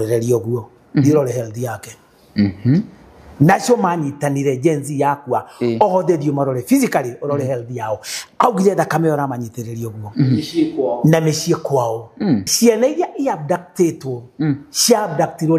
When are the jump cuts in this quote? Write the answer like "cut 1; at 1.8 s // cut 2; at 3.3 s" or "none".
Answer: cut 1; at 12.5 s